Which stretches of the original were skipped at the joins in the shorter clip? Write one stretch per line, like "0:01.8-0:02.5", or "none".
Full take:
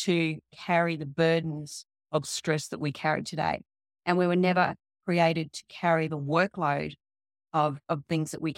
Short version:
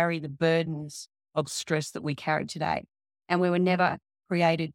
none